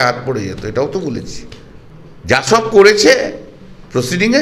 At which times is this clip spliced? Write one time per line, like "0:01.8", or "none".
none